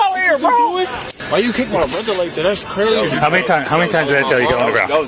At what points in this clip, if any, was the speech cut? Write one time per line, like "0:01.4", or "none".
0:01.1